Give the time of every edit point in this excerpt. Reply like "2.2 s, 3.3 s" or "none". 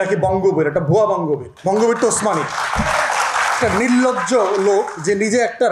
1.5 s